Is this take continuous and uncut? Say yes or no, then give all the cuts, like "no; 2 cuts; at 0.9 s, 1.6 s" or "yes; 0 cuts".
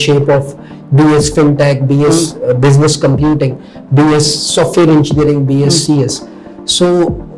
yes; 0 cuts